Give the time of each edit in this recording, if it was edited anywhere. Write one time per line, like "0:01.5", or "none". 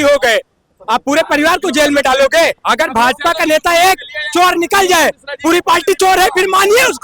0:02.6